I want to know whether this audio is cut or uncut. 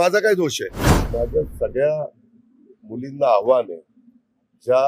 cut